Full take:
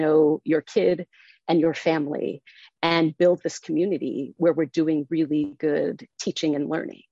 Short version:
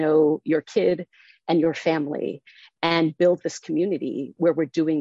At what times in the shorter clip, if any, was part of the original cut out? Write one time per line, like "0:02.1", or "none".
none